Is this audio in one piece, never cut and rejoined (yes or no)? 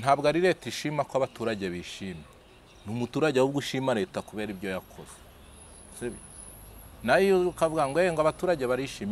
yes